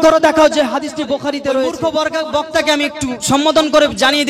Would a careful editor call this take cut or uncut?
cut